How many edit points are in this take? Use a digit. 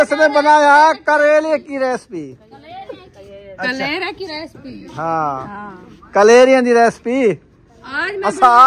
0